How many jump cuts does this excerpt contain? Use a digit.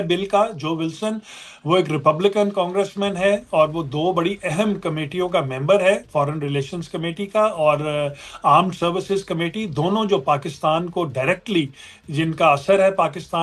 0